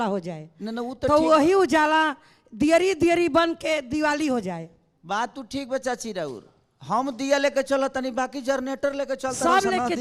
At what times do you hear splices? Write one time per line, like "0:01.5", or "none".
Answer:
none